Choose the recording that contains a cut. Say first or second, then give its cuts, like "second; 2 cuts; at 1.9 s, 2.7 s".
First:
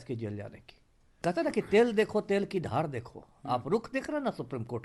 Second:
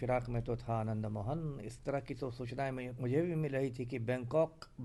first; 1 cut; at 1.2 s